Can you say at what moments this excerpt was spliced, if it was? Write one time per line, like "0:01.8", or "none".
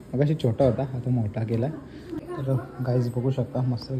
0:02.2